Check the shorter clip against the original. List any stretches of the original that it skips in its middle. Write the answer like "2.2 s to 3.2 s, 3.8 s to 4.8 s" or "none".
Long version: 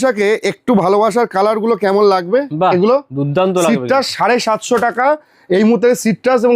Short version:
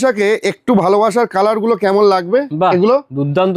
none

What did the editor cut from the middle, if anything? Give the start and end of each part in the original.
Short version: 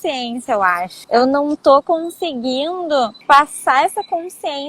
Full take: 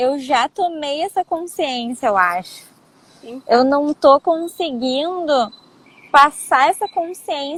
2.5 s to 3.3 s, 5.5 s to 6.0 s

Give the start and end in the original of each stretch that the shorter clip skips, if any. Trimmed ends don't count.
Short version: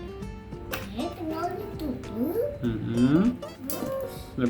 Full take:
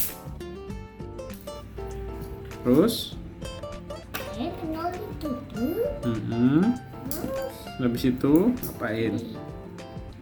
1.4 s to 4.4 s

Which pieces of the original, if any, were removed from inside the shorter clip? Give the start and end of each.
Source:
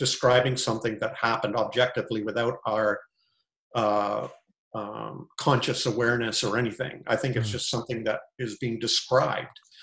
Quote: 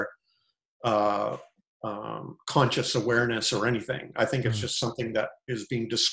none

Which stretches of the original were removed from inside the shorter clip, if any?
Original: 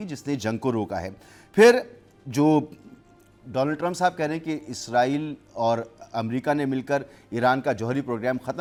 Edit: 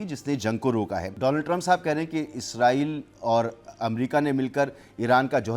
1.0 s to 3.4 s

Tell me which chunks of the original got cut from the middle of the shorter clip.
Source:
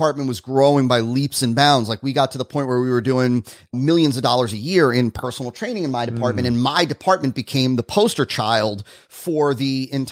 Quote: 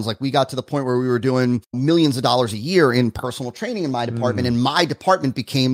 3.5 s to 3.7 s

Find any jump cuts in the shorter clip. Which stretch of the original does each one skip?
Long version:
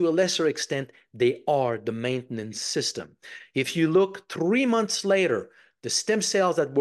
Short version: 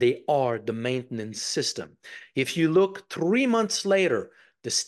none

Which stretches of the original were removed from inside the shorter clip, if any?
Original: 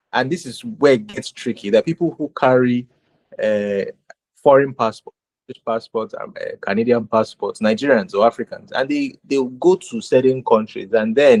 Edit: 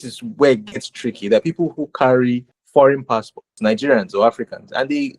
3.0 s to 4.2 s, 5.1 s to 7.4 s

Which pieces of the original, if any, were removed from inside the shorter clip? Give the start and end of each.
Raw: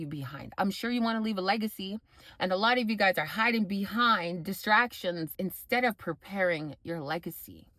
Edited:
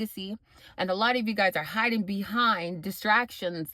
none

